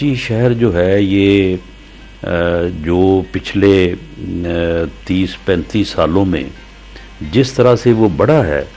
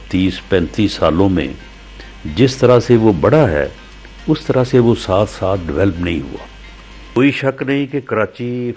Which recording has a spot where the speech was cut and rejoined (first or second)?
second